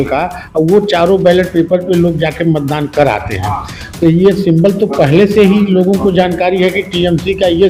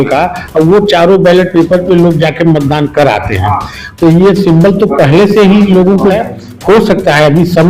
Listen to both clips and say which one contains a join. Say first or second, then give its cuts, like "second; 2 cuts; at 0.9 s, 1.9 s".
second; 1 cut; at 6.1 s